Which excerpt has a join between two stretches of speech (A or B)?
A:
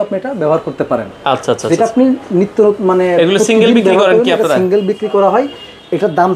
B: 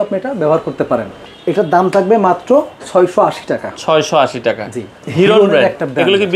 B